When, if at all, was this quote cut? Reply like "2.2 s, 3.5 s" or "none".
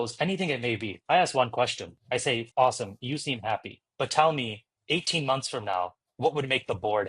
0.9 s, 2.4 s